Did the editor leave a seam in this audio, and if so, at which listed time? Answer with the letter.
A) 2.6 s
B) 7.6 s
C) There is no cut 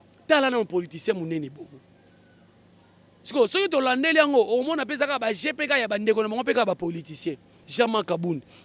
B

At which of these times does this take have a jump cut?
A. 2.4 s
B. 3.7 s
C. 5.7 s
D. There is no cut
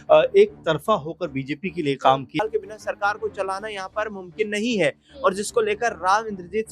A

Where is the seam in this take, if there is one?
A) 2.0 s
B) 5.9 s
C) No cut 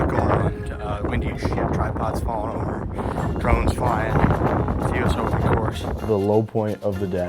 B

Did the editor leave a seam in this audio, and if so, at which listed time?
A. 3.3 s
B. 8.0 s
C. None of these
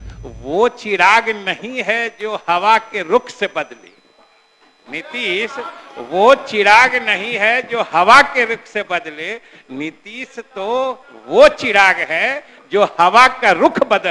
C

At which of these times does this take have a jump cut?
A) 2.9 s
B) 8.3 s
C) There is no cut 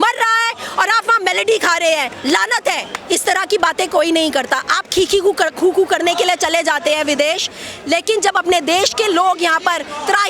A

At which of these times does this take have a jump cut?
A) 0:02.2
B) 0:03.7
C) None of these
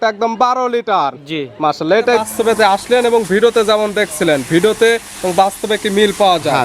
A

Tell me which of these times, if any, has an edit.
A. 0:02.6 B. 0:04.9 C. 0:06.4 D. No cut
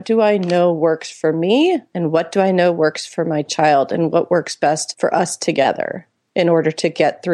B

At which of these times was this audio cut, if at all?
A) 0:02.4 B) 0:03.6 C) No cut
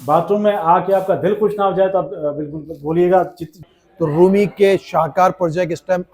B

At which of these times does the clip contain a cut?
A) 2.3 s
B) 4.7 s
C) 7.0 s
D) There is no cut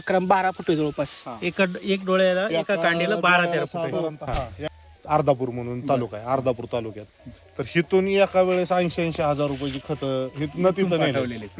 B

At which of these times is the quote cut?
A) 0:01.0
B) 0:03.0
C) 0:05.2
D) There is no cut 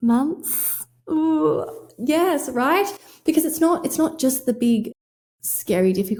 D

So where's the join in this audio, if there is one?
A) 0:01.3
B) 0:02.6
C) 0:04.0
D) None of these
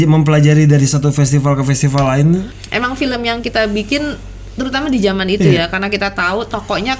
B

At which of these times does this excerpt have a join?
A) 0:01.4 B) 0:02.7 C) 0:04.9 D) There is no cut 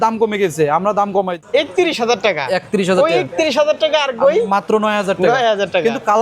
A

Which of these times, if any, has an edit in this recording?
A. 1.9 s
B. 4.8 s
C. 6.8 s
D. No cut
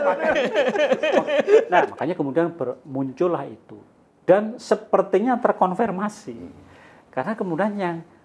A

